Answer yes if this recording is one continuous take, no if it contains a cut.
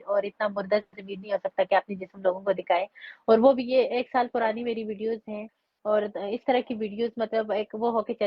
yes